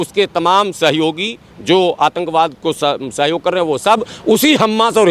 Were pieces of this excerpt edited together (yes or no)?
no